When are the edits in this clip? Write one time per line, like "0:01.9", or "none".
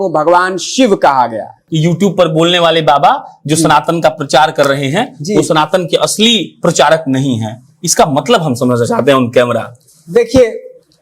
0:01.6